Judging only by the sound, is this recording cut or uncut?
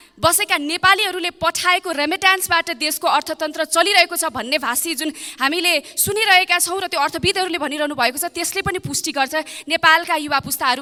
uncut